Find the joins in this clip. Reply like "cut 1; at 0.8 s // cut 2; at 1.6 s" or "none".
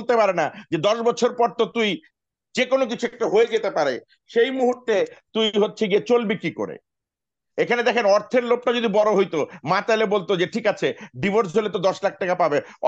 none